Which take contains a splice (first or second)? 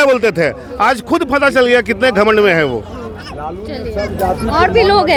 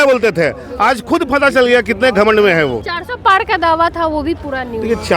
second